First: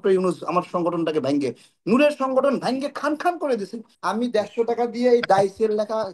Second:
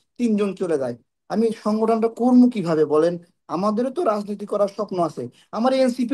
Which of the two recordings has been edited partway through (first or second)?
first